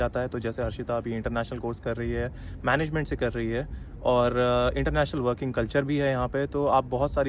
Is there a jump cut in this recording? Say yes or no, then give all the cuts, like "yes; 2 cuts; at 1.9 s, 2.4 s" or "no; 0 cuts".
no; 0 cuts